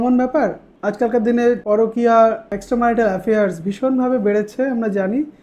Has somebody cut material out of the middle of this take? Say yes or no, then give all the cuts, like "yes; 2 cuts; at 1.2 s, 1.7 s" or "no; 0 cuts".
yes; 2 cuts; at 1.6 s, 2.5 s